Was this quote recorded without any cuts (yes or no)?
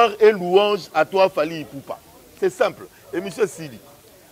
yes